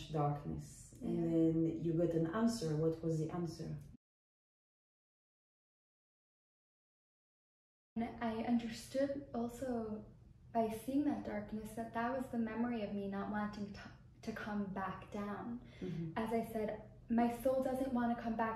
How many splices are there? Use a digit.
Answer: 0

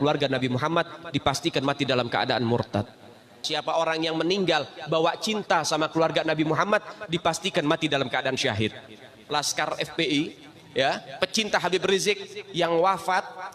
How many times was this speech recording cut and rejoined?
2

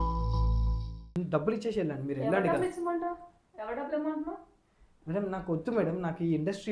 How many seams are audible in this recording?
1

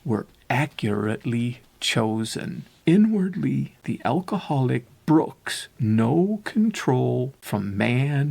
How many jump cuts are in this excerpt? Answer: 3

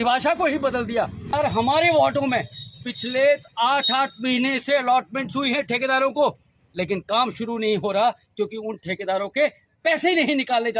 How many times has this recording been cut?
1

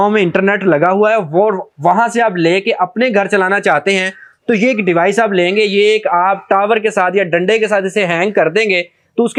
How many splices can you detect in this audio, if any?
0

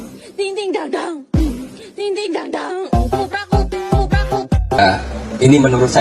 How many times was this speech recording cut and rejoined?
1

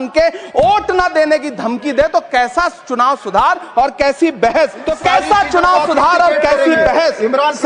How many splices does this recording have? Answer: 1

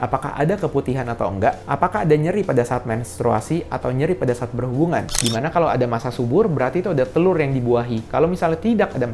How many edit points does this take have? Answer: 1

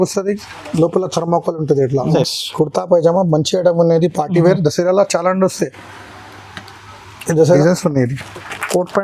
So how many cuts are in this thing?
2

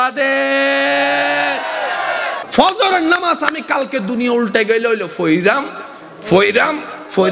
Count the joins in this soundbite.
1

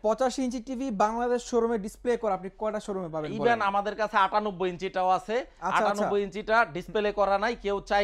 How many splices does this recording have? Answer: 0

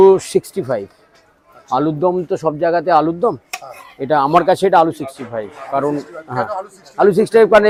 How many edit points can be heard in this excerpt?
0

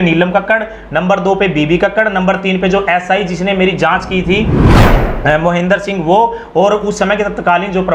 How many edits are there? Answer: 0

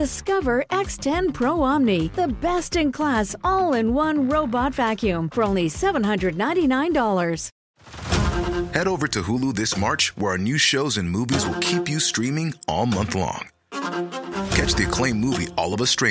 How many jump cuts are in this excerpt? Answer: 1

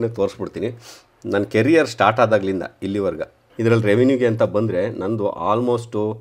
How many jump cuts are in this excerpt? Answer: 1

